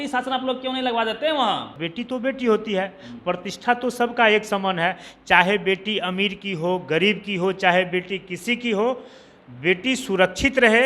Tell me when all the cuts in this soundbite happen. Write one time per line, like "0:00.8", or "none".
0:01.8